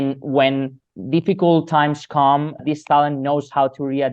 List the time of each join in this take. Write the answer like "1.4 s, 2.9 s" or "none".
0.9 s, 2.6 s